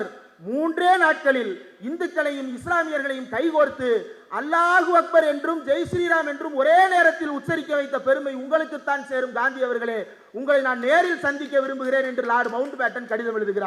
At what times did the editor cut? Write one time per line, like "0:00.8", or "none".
none